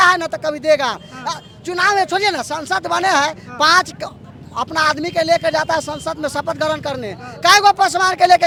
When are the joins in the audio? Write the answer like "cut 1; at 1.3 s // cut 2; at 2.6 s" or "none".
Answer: none

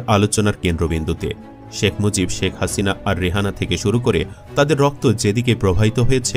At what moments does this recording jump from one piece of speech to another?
none

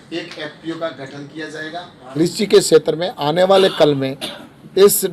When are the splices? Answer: cut 1; at 2.1 s

